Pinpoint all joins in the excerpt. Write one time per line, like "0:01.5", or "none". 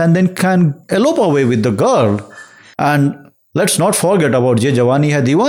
none